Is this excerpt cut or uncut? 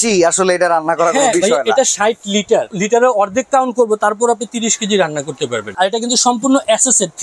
cut